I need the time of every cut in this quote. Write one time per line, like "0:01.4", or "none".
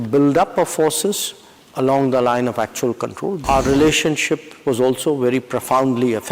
0:03.4